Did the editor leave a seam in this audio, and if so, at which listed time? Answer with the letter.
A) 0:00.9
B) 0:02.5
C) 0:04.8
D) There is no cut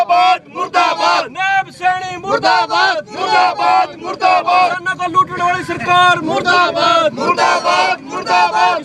C